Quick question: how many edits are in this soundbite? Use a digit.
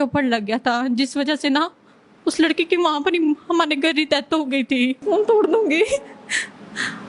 1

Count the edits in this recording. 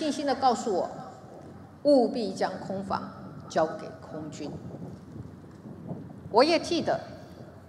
0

